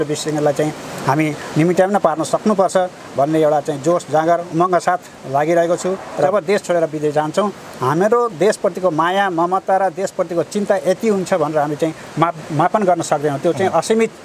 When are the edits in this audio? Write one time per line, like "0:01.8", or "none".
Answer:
0:06.3